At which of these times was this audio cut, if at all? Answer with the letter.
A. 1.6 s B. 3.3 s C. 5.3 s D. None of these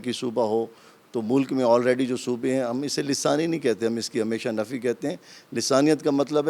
D